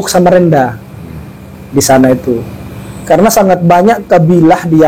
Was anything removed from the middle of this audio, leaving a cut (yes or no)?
no